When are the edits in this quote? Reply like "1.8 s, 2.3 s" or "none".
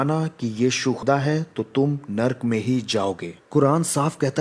1.0 s, 3.3 s